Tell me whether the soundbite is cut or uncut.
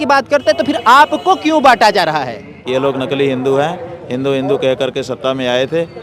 cut